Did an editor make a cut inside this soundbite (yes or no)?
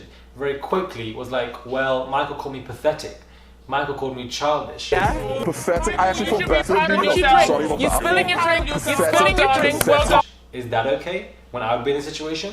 yes